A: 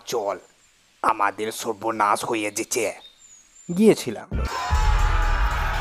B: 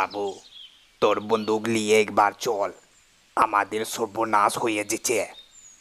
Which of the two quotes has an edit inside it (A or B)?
A